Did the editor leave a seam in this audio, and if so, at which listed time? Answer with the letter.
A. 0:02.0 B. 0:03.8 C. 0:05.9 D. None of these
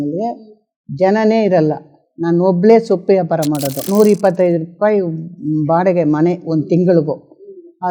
B